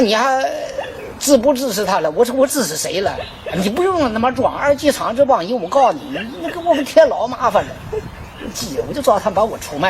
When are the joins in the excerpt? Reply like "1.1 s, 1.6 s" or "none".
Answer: none